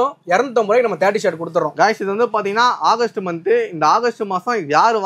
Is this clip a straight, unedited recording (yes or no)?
yes